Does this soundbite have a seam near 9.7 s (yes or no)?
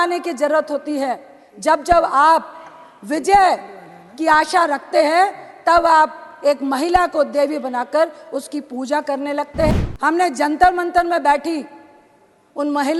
yes